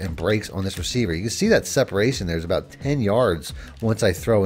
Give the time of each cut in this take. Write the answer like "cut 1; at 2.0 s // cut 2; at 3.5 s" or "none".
none